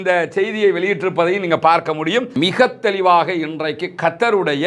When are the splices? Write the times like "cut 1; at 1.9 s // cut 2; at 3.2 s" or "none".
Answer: cut 1; at 2.3 s